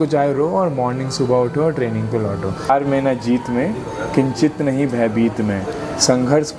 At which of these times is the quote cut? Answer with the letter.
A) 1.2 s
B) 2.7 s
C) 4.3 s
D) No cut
B